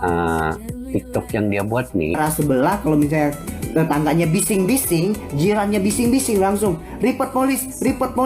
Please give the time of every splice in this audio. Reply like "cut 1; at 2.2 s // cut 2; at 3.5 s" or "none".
cut 1; at 2.2 s